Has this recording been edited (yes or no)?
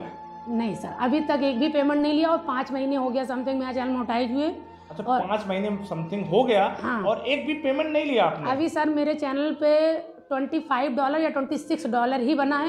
no